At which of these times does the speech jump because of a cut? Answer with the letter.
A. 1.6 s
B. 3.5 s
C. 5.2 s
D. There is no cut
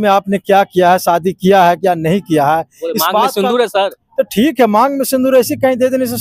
D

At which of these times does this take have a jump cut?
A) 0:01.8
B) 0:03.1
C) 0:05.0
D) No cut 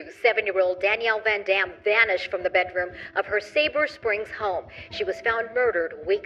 D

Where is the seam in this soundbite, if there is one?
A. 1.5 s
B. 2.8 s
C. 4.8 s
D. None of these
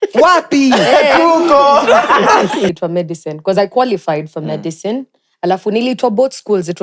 B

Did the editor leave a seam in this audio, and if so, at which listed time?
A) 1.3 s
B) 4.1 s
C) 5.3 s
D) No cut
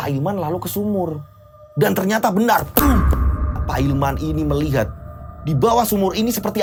D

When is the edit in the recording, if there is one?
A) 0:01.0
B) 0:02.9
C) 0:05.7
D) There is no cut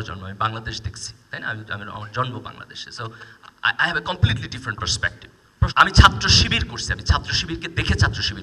C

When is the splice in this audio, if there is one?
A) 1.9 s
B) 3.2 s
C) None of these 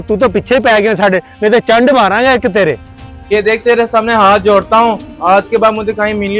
B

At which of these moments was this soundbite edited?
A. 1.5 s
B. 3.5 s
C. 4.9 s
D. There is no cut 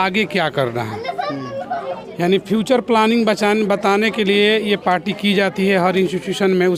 D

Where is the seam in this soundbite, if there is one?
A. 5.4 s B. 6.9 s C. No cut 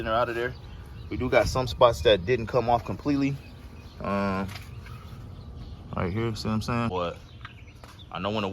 B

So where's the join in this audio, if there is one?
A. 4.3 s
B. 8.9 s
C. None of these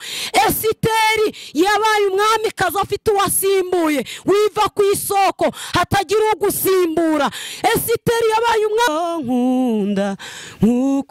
B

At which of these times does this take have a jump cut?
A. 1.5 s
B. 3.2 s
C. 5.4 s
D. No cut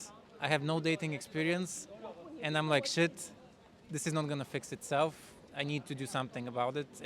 C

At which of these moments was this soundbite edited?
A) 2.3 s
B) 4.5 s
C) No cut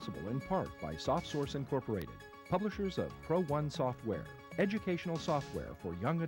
C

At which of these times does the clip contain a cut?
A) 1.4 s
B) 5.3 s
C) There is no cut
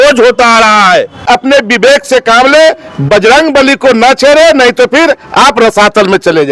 A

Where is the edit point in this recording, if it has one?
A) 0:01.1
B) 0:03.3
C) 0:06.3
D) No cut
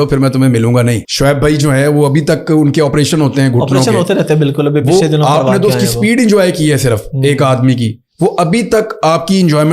A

